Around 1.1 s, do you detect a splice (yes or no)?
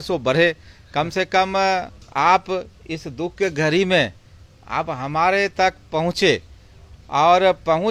no